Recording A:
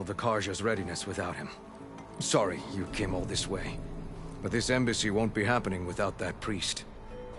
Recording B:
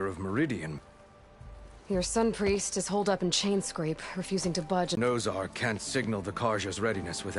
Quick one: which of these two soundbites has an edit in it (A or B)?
B